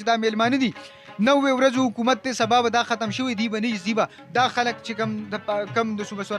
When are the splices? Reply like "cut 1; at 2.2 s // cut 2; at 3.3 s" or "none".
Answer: none